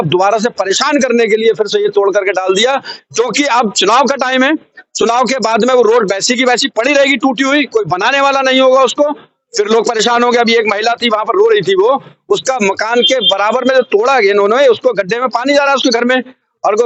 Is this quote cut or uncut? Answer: uncut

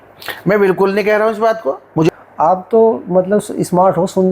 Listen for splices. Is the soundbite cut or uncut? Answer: cut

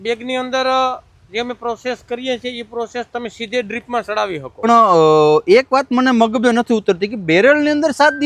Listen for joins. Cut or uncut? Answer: cut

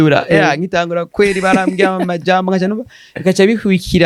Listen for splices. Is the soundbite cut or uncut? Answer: uncut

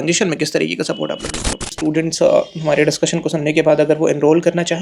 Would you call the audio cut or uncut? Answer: cut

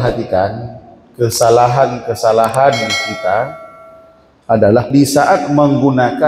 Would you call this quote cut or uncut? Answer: cut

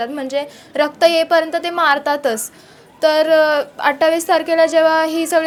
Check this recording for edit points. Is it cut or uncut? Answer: uncut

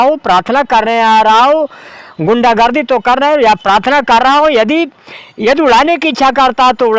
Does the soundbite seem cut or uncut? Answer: uncut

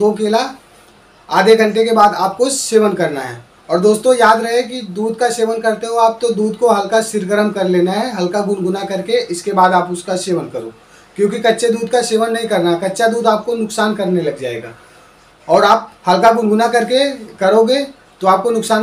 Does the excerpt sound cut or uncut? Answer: uncut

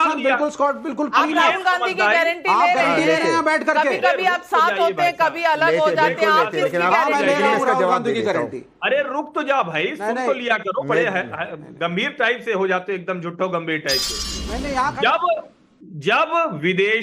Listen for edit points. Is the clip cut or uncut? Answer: uncut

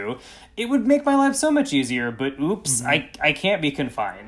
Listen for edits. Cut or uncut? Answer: uncut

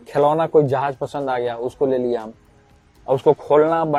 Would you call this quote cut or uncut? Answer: uncut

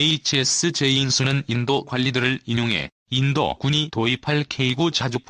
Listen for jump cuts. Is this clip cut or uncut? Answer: cut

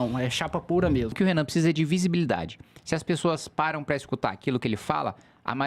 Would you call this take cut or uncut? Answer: cut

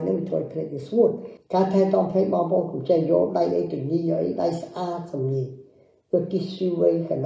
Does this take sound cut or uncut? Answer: cut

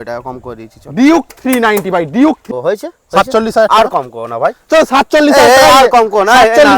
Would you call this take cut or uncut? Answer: cut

